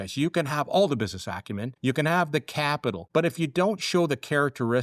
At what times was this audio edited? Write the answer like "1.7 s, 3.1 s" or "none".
1.7 s, 3.0 s